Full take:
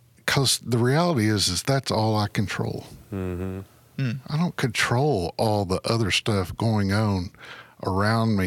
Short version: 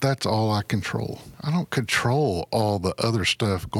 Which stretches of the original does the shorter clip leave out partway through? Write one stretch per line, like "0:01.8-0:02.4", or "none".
0:03.0-0:04.2